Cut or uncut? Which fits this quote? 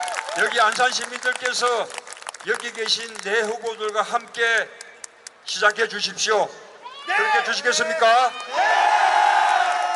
uncut